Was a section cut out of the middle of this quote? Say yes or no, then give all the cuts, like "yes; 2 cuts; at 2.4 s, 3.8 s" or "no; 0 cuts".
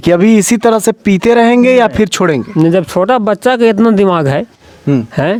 no; 0 cuts